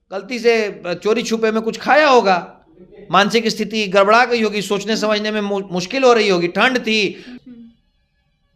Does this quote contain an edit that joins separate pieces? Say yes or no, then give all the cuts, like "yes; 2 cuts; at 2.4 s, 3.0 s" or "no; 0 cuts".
yes; 1 cut; at 7.3 s